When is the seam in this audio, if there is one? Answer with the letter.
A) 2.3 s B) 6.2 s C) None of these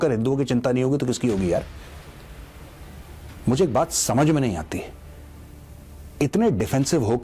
C